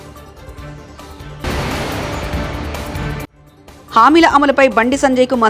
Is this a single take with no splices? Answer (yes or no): yes